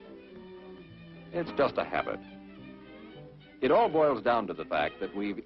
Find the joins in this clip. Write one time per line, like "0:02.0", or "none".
0:01.2